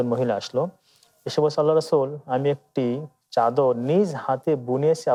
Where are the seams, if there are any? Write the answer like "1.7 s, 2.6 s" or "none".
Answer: none